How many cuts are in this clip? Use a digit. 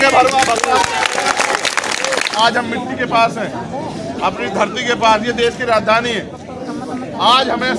1